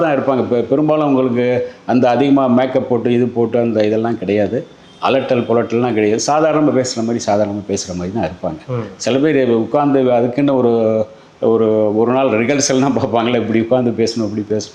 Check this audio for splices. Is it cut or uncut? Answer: uncut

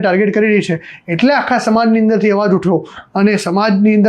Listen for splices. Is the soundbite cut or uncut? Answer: uncut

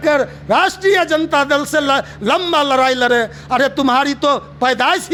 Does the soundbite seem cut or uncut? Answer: uncut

